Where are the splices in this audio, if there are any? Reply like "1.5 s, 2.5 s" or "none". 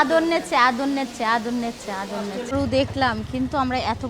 2.5 s

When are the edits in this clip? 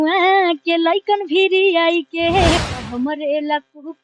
2.6 s

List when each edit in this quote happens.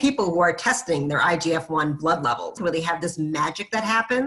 2.6 s

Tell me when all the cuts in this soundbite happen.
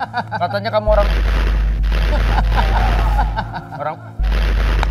none

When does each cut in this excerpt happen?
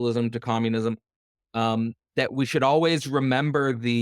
none

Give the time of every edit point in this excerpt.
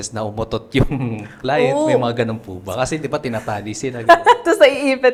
none

